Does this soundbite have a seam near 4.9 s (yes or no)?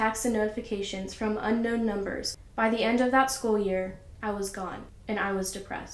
yes